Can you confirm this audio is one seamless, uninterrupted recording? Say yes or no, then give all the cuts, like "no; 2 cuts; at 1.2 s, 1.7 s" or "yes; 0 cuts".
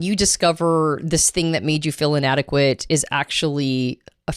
yes; 0 cuts